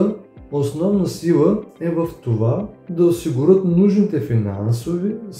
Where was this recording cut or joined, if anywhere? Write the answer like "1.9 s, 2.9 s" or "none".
none